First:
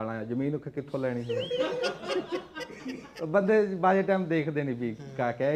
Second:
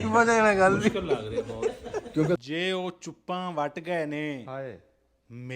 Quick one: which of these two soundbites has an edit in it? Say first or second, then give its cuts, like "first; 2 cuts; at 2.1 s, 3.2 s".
second; 1 cut; at 2.4 s